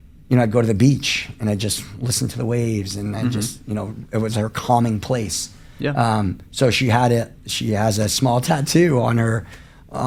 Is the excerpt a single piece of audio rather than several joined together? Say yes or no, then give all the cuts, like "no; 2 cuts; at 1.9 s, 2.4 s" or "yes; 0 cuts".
yes; 0 cuts